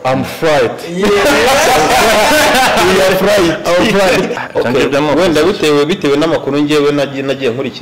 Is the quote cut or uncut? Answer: cut